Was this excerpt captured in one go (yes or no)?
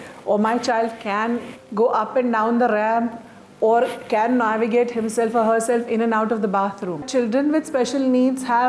no